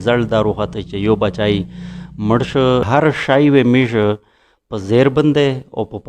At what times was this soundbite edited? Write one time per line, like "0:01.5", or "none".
0:02.9